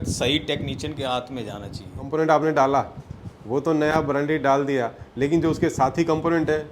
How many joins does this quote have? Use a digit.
1